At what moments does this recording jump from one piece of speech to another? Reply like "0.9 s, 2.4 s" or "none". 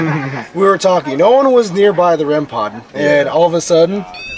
none